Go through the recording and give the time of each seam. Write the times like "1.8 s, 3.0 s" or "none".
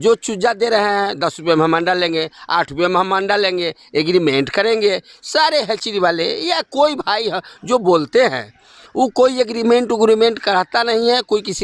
none